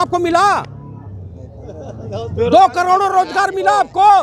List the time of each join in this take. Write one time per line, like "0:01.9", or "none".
none